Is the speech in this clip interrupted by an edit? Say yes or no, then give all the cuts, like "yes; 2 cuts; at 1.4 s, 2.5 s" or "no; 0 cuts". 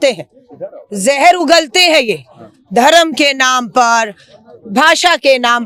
no; 0 cuts